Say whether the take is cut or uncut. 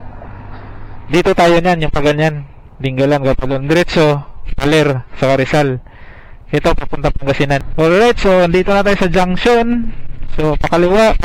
cut